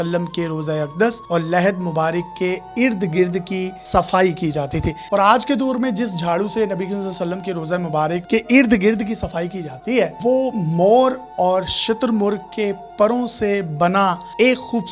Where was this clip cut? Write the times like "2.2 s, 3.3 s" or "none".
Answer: 5.0 s, 8.2 s, 10.2 s